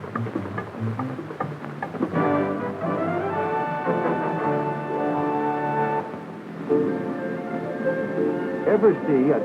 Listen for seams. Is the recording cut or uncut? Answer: uncut